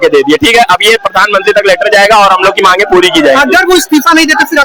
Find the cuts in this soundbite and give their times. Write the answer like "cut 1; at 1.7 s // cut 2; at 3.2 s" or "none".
none